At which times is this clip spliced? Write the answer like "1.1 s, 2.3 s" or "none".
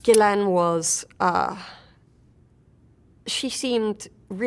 none